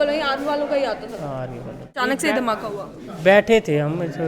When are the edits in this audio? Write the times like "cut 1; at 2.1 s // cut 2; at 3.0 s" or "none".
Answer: cut 1; at 2.0 s